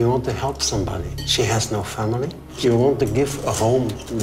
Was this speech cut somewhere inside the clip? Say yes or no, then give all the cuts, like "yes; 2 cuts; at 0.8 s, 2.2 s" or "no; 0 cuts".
yes; 1 cut; at 2.6 s